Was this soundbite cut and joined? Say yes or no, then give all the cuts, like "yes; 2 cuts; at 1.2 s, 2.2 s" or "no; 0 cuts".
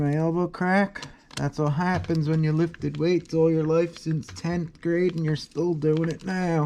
no; 0 cuts